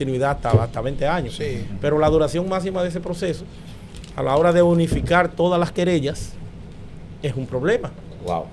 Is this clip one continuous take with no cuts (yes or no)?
yes